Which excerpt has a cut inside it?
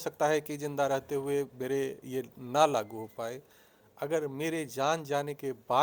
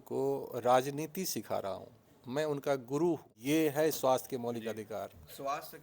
second; 1 cut; at 3.3 s

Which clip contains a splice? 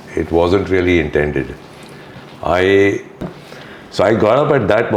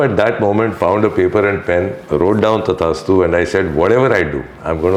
first; 1 cut; at 3.3 s

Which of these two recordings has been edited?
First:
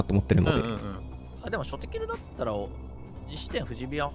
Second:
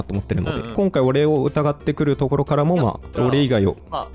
second; 2 cuts; at 0.7 s, 3.1 s

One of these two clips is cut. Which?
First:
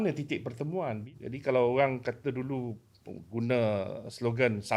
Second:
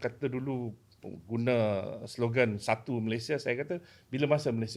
first; 1 cut; at 1.0 s

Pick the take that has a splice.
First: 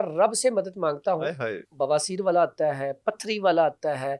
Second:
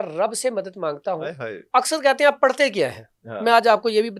first; 1 cut; at 1.6 s

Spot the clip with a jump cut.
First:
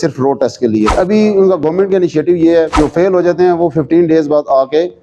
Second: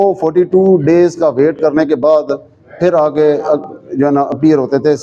first; 2 cuts; at 0.9 s, 2.7 s

